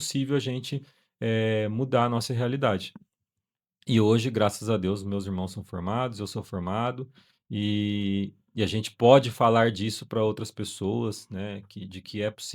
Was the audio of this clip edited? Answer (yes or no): no